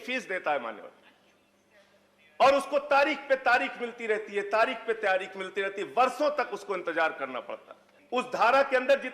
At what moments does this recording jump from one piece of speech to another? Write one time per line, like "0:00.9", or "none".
0:07.9